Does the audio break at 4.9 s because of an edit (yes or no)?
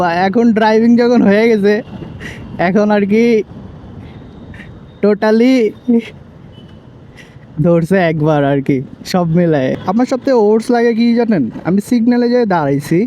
no